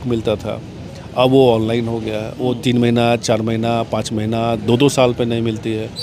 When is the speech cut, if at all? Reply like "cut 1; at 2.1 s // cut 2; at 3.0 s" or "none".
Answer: none